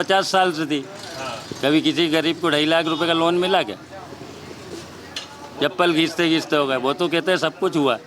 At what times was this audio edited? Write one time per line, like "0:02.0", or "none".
none